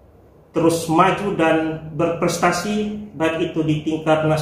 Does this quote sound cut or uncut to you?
uncut